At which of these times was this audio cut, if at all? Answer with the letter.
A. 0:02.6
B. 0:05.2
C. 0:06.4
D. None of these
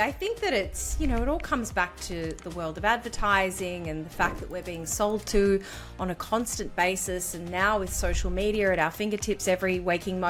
D